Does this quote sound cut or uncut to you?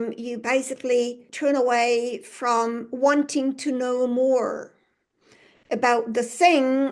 cut